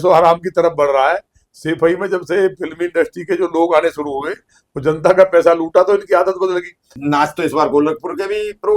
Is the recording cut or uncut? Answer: cut